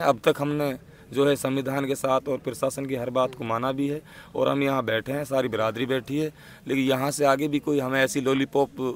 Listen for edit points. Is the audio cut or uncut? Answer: uncut